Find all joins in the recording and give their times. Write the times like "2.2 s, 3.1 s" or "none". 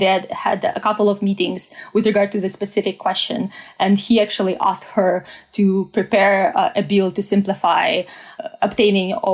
none